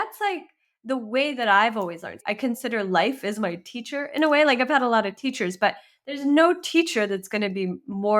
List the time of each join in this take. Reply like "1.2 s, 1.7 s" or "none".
2.2 s